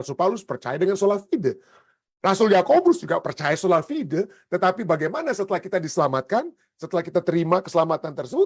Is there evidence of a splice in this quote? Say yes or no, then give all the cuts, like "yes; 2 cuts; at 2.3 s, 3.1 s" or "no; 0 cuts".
no; 0 cuts